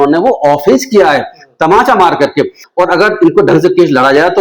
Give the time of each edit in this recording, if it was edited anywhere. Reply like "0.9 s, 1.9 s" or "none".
2.6 s